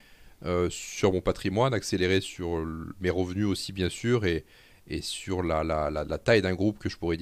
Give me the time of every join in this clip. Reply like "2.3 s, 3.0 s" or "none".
none